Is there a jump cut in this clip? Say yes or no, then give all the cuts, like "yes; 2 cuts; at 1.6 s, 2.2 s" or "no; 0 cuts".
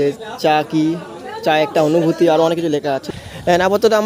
yes; 1 cut; at 3.1 s